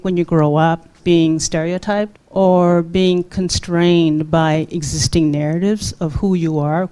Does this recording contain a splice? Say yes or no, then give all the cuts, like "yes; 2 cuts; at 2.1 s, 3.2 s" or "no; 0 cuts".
yes; 2 cuts; at 1.0 s, 2.2 s